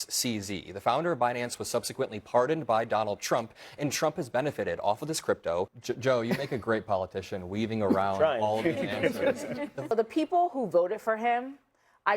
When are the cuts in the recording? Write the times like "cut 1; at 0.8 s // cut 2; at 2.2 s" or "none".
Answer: cut 1; at 5.8 s // cut 2; at 9.9 s